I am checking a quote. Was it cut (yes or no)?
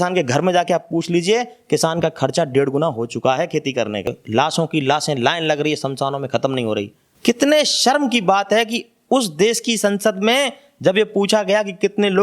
yes